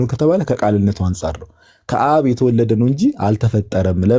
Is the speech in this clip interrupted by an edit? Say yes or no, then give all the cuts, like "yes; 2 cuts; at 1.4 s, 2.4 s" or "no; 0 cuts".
no; 0 cuts